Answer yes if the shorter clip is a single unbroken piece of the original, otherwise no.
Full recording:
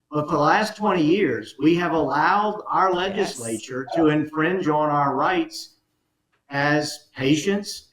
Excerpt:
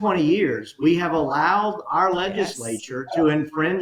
yes